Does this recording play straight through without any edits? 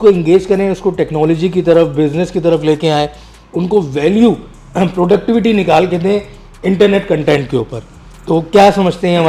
yes; 0 cuts

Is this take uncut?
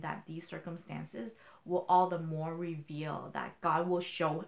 no; 1 cut; at 3.5 s

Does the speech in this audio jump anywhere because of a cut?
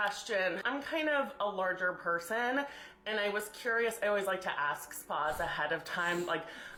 no; 0 cuts

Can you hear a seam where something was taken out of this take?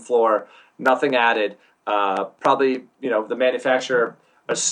no; 0 cuts

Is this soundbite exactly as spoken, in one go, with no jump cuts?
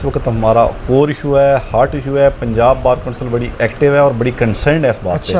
yes; 0 cuts

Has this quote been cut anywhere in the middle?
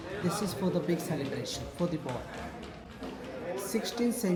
no; 0 cuts

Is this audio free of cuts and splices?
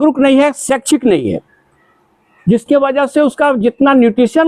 yes; 0 cuts

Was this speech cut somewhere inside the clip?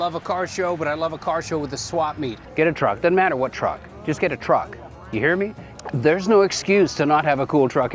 yes; 2 cuts; at 2.4 s, 5.7 s

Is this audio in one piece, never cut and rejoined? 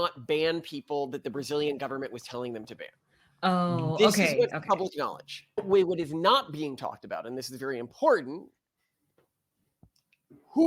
no; 1 cut; at 5.6 s

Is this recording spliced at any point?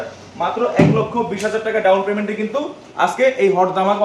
no; 0 cuts

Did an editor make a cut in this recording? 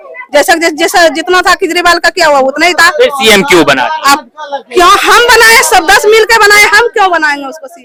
no; 0 cuts

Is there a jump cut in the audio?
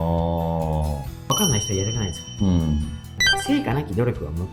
yes; 2 cuts; at 1.3 s, 3.1 s

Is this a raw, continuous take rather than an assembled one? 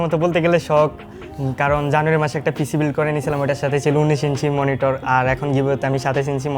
yes; 0 cuts

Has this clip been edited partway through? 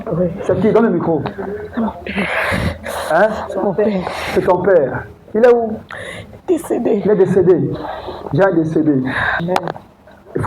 yes; 1 cut; at 9.4 s

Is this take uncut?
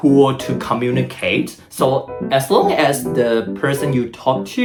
yes; 0 cuts

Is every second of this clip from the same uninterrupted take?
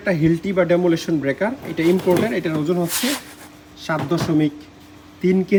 yes; 0 cuts

